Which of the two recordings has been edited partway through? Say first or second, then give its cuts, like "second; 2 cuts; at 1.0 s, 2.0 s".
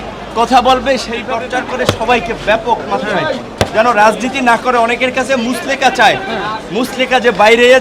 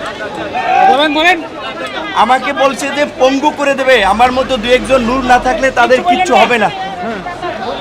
first; 1 cut; at 1.2 s